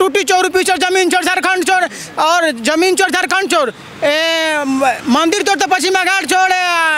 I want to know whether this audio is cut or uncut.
uncut